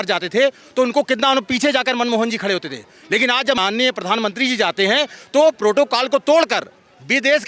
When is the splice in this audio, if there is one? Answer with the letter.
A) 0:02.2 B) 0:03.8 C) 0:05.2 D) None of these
D